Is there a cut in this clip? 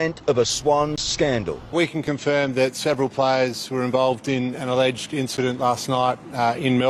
no; 0 cuts

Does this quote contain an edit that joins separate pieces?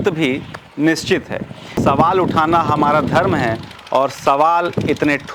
yes; 1 cut; at 1.8 s

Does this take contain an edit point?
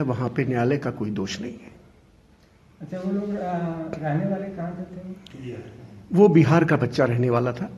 no; 0 cuts

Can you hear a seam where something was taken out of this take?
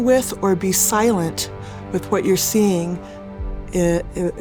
no; 0 cuts

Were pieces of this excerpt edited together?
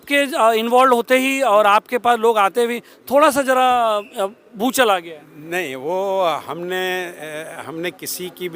no; 0 cuts

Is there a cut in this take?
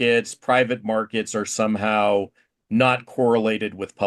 no; 0 cuts

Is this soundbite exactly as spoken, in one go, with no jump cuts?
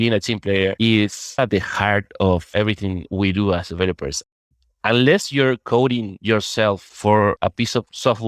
no; 2 cuts; at 1.4 s, 4.5 s

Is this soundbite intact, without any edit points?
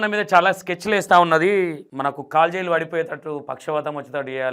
yes; 0 cuts

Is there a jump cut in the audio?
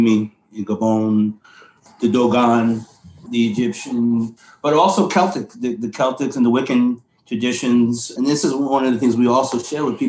yes; 2 cuts; at 1.8 s, 3.2 s

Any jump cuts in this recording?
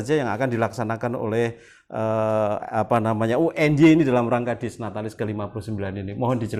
no; 0 cuts

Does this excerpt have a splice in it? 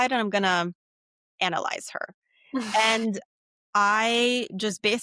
no; 0 cuts

